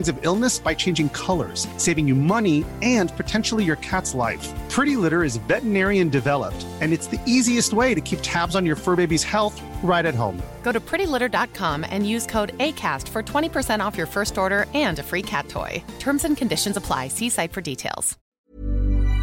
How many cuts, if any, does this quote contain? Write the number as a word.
one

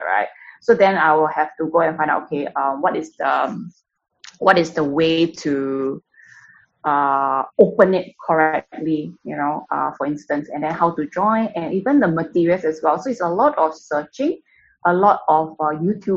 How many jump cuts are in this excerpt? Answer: zero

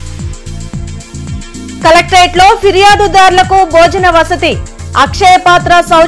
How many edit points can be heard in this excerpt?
one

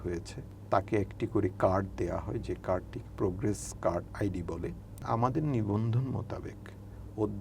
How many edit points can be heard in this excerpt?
one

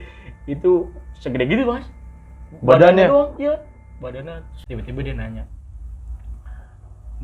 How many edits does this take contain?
one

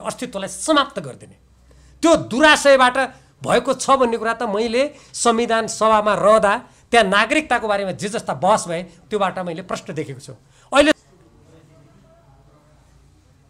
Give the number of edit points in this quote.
one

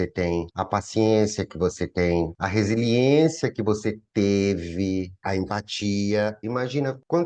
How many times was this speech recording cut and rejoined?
two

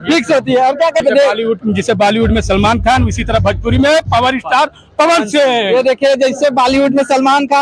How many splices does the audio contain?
one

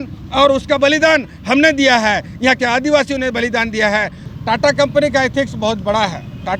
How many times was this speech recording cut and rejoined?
one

